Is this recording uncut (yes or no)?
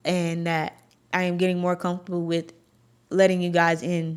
yes